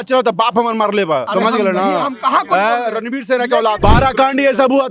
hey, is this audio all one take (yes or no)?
no